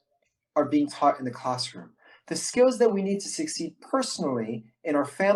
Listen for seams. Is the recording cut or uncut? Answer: uncut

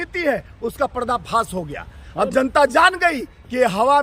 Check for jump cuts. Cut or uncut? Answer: uncut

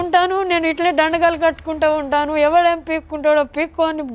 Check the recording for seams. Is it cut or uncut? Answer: uncut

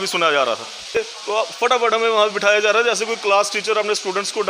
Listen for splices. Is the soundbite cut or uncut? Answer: cut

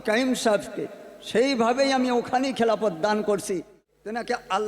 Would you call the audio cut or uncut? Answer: cut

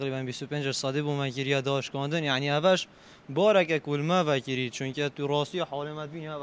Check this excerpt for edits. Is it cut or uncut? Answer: uncut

